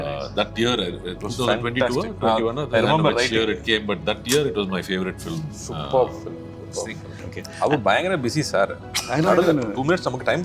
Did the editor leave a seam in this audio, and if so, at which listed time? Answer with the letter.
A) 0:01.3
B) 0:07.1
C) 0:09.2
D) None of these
B